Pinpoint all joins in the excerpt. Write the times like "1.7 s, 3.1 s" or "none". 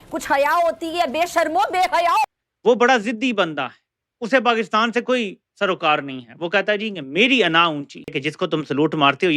none